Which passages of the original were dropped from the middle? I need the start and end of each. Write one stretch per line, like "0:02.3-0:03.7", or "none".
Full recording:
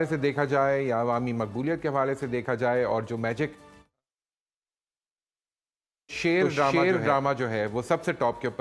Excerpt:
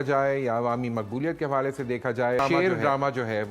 0:02.8-0:06.6